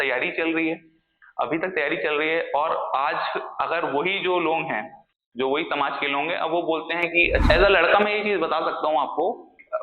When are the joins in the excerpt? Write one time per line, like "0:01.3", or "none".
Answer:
0:07.4